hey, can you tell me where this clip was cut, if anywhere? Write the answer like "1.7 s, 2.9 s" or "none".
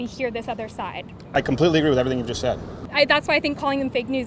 2.8 s